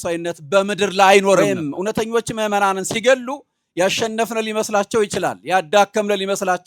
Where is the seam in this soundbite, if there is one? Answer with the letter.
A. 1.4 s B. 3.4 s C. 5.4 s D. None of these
A